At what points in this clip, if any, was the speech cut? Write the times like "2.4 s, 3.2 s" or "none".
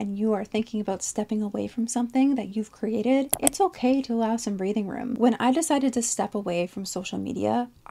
3.3 s, 5.2 s